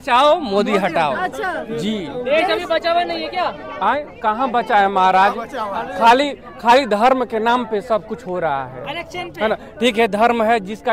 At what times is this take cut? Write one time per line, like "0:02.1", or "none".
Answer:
none